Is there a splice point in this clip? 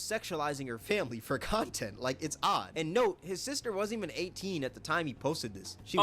no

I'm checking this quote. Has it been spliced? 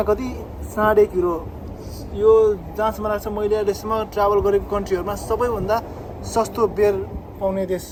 no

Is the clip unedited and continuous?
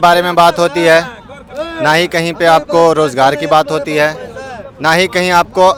yes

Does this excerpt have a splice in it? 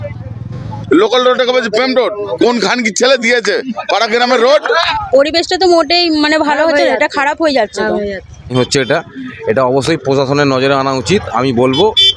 yes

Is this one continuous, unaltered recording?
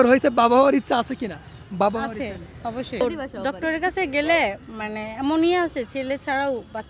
no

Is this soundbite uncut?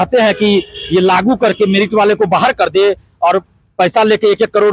yes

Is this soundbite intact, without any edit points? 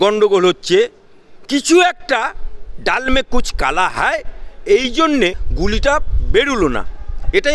no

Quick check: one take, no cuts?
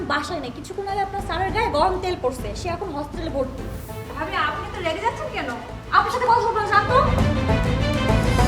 yes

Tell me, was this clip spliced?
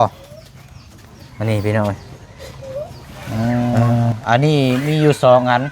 yes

